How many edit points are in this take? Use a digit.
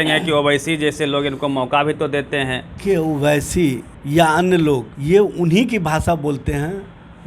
3